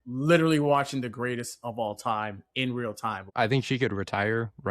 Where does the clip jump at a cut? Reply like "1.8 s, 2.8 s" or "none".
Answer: 3.3 s